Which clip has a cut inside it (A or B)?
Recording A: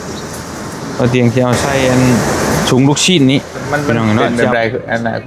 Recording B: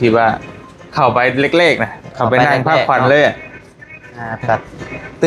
A